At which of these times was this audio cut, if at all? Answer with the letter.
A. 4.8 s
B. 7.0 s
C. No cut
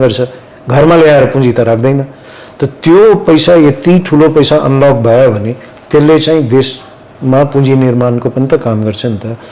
C